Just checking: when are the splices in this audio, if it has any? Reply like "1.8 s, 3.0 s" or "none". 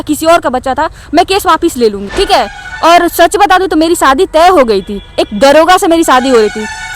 2.0 s